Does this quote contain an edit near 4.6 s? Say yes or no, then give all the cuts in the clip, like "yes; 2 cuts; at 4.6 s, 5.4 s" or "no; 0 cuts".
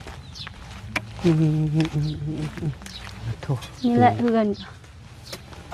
no; 1 cut; at 3.3 s